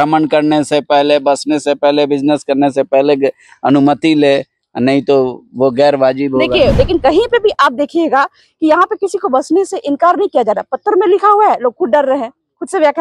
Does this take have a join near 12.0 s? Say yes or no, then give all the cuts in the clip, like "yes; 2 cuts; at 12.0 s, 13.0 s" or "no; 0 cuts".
no; 1 cut; at 6.7 s